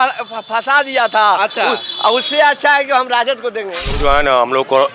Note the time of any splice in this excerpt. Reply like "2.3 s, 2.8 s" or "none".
3.8 s